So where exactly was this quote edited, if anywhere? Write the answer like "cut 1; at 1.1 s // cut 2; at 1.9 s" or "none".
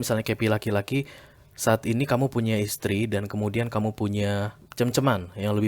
cut 1; at 4.6 s